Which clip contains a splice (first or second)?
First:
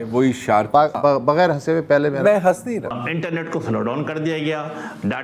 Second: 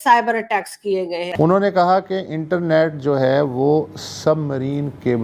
first